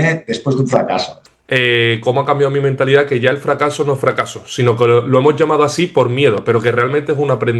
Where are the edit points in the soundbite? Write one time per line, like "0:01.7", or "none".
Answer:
0:01.2